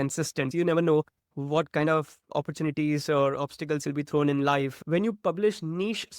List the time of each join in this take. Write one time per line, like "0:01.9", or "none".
0:04.8